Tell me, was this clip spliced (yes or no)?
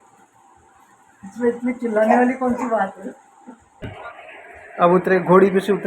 yes